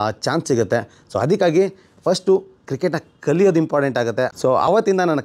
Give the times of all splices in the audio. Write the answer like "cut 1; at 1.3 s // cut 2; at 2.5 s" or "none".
cut 1; at 4.3 s